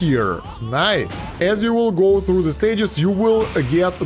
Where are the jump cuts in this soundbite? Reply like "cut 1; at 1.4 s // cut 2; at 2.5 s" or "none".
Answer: cut 1; at 1.3 s